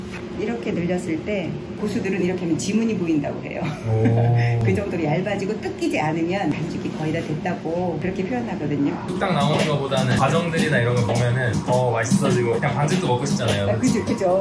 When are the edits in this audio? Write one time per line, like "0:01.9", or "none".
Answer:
0:01.8
0:09.0